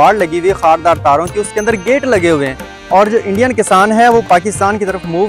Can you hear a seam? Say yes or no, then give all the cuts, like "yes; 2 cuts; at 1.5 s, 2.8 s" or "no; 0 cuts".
no; 0 cuts